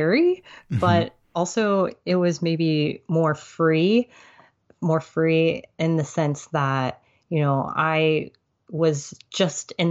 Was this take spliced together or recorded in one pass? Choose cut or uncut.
uncut